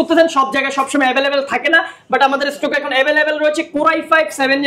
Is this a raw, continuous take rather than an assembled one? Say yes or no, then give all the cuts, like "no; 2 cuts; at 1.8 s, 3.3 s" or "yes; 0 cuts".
yes; 0 cuts